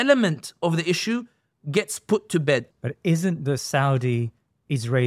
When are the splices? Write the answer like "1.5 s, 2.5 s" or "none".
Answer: 2.7 s